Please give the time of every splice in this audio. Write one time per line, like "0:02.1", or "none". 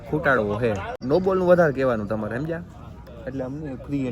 0:00.9

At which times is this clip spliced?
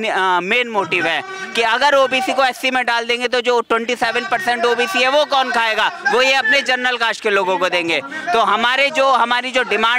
none

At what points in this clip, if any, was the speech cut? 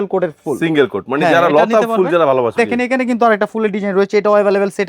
0:02.5

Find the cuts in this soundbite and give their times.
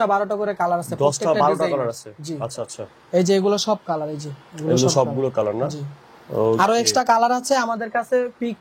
none

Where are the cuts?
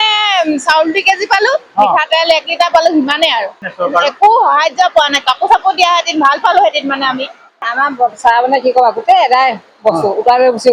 0:03.6
0:07.6

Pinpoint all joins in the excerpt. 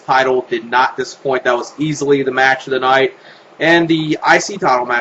none

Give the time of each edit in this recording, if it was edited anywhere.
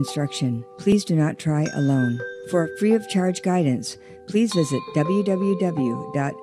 0:00.9
0:02.3

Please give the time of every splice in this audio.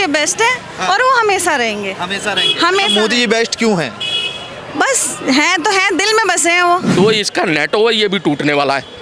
0:06.9

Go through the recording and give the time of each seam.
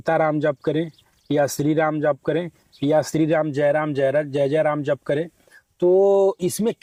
none

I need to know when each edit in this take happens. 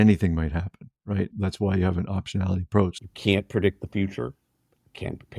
0:01.3
0:03.0

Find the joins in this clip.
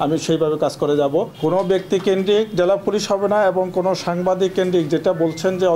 0:01.3

